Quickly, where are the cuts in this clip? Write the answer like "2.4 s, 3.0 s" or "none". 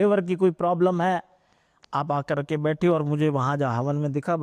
none